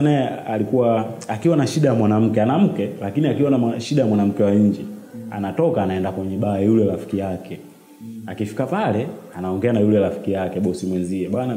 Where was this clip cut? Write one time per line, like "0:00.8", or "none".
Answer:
none